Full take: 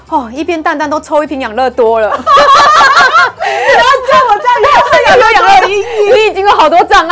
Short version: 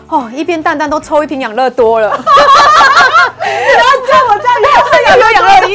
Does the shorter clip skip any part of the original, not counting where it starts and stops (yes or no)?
no